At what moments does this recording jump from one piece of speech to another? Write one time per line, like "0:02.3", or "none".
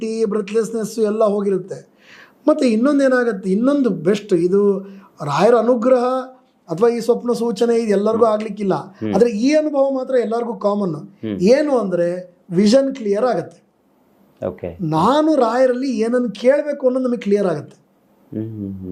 none